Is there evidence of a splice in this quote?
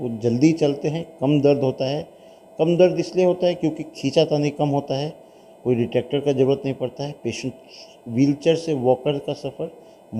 no; 0 cuts

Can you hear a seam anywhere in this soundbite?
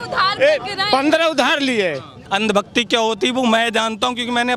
yes; 1 cut; at 2.2 s

